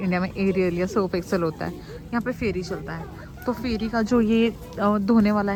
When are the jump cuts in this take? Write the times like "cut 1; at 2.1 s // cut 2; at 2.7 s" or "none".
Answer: none